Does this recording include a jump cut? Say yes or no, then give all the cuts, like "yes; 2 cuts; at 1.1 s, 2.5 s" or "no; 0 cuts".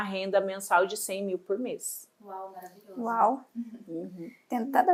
no; 0 cuts